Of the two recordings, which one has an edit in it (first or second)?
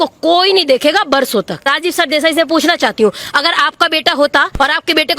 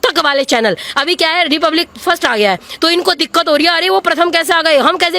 first